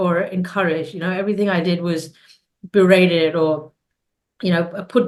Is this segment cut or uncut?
uncut